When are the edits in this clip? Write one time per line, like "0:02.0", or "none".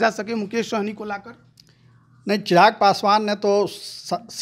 none